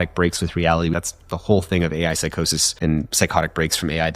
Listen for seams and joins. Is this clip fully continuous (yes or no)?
no